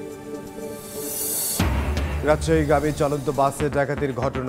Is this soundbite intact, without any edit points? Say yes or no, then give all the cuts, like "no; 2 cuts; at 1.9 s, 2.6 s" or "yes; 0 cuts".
yes; 0 cuts